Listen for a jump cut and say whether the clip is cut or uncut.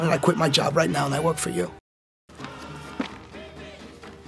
cut